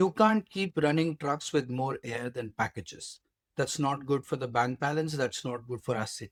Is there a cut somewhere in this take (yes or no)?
no